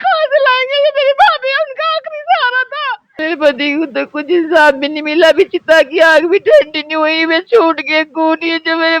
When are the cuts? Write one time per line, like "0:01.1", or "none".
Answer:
0:03.1